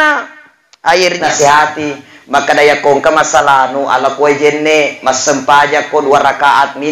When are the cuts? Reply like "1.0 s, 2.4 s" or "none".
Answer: 1.2 s